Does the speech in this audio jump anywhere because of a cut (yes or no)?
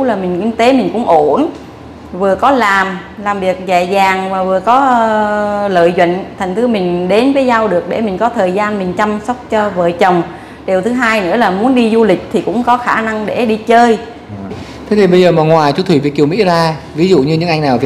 yes